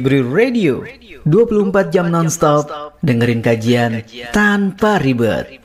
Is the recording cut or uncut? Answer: uncut